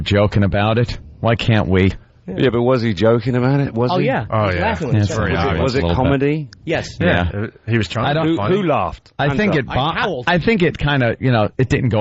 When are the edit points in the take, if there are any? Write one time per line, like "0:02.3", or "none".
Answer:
none